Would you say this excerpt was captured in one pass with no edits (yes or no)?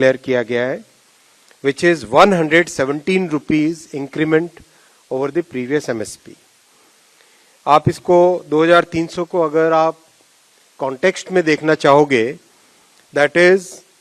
yes